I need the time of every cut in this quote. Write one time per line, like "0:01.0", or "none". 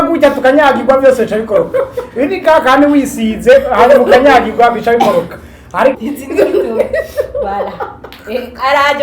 0:06.0